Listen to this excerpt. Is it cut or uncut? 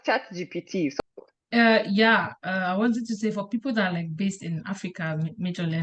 cut